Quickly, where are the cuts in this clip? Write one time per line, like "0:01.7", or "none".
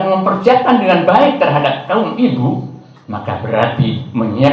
none